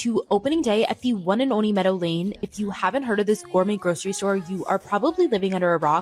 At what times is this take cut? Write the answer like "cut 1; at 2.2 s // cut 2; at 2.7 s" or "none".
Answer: none